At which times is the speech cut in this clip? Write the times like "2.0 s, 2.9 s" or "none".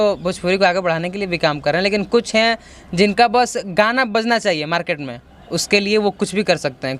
none